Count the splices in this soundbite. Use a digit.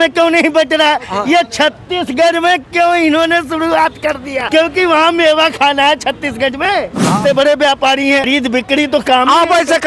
3